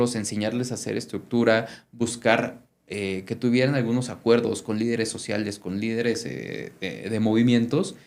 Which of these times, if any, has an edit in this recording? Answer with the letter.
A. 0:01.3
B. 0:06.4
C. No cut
C